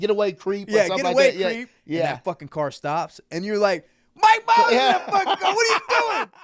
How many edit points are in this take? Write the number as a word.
zero